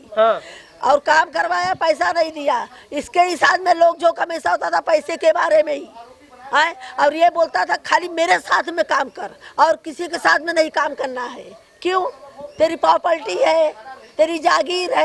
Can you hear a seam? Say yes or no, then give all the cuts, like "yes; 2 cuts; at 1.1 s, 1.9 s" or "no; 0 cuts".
no; 0 cuts